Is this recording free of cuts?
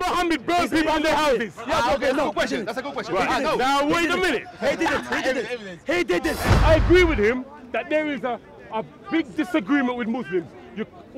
no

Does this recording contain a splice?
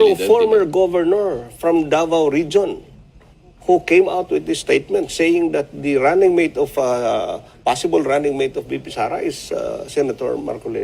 no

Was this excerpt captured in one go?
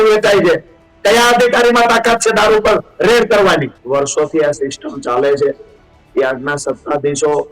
no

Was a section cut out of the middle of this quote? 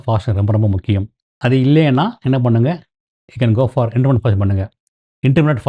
yes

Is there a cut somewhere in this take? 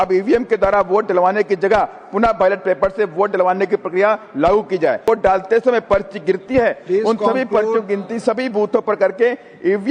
yes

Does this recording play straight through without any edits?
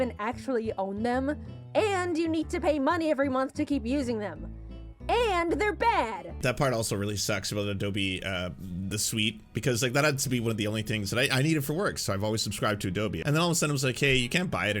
no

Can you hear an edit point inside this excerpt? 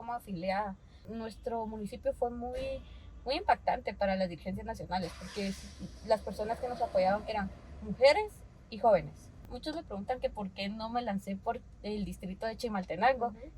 yes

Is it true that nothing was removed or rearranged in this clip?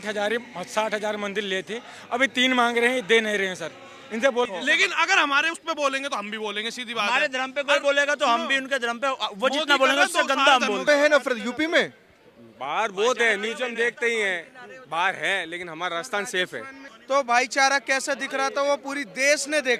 no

